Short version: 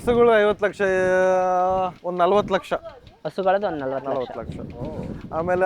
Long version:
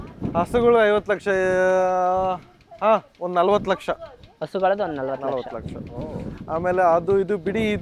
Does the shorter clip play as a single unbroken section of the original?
no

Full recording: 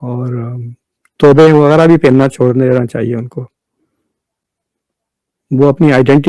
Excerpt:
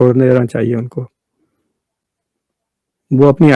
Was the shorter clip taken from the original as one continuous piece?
yes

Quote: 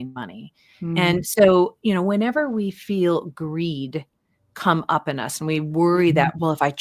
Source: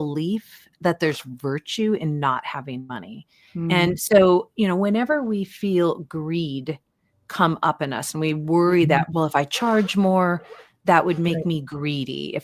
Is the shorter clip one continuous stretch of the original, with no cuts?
yes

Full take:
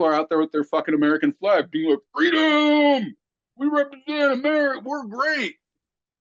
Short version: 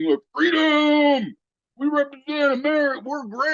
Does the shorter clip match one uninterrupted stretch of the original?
yes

